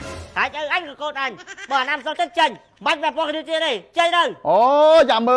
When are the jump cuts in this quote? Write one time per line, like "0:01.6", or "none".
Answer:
none